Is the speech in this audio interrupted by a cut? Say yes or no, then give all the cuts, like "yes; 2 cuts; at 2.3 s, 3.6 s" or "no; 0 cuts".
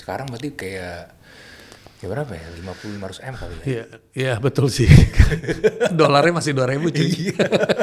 no; 0 cuts